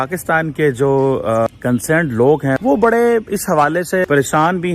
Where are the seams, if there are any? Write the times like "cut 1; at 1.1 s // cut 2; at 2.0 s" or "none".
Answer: cut 1; at 1.5 s // cut 2; at 2.6 s // cut 3; at 4.0 s